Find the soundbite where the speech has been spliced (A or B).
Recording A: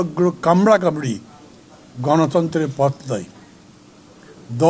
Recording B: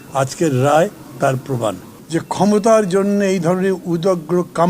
B